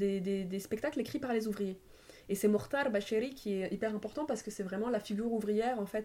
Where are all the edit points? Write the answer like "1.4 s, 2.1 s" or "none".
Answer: none